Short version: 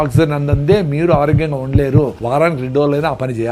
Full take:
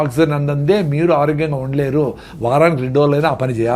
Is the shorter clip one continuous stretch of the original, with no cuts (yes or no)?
no